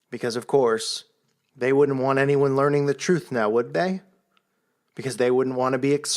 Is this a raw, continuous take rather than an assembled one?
no; 1 cut; at 2.8 s

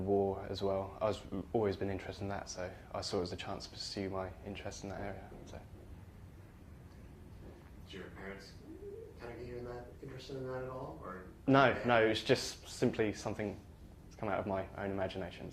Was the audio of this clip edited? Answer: yes; 1 cut; at 4.4 s

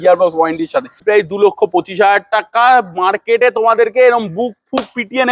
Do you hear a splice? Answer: yes; 1 cut; at 1.0 s

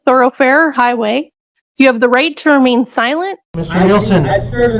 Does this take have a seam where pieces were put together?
yes; 1 cut; at 3.4 s

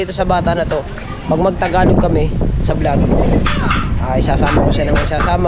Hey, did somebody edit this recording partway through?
no; 0 cuts

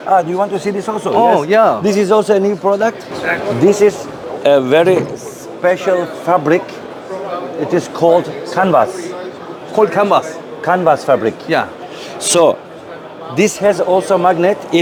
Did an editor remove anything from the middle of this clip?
no; 0 cuts

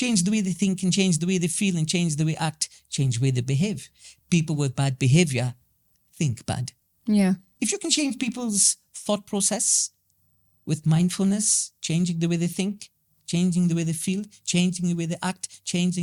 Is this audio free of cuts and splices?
yes; 0 cuts

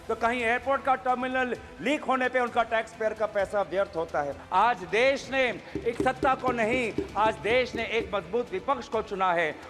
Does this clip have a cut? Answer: yes; 1 cut; at 4.4 s

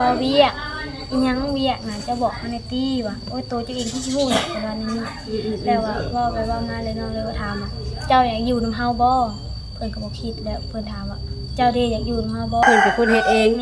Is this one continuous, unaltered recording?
no; 1 cut; at 12.6 s

